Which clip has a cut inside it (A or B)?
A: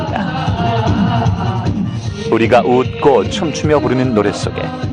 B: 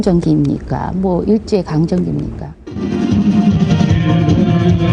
B